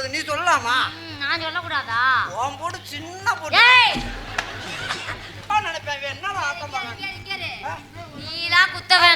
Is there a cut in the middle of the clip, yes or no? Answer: yes